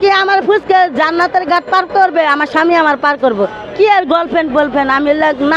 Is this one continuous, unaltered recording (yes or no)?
yes